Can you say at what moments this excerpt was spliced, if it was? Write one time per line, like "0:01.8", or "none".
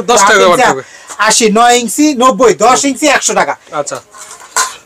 none

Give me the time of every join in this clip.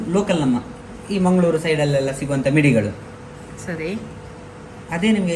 none

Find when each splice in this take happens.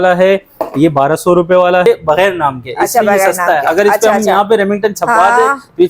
0:01.9

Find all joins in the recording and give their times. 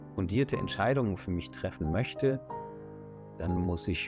none

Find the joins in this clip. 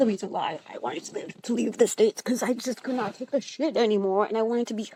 none

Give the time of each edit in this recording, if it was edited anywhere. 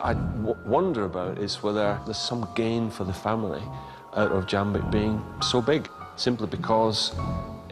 0:02.1
0:06.0

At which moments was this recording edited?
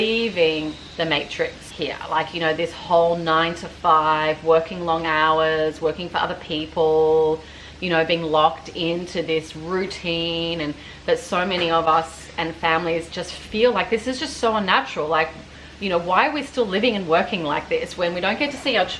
0:00.8
0:01.6

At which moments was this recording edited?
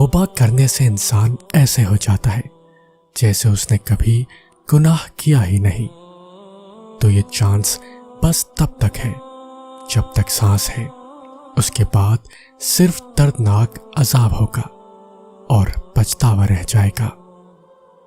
0:17.1

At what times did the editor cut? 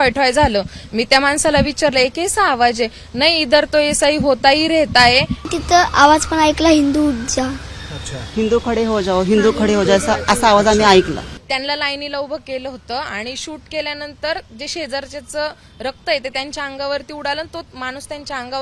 0:05.5
0:11.3

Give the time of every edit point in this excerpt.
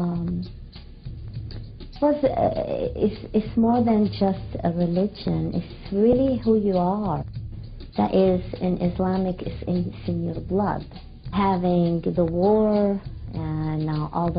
0:11.3

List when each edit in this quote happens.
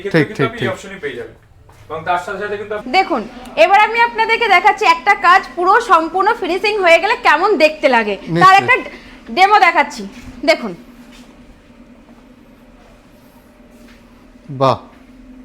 0:02.8

